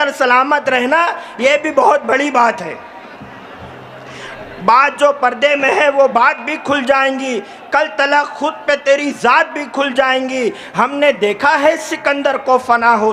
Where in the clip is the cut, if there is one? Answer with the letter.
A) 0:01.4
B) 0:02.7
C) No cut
C